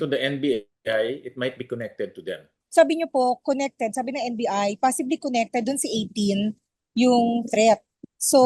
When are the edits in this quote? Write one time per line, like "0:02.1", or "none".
0:02.5